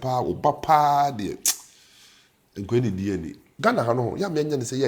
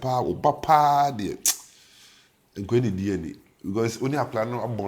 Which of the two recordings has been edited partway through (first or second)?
first